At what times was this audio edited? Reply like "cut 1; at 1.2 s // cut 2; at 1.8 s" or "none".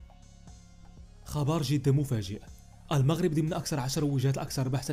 none